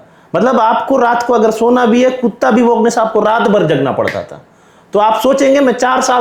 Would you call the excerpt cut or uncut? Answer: uncut